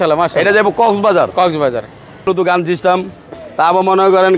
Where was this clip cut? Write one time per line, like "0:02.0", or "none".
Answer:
none